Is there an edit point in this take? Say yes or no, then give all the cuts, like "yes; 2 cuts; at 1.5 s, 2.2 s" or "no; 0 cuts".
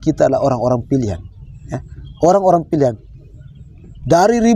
no; 0 cuts